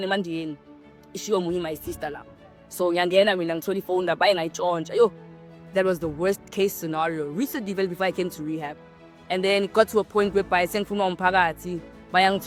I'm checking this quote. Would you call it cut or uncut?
uncut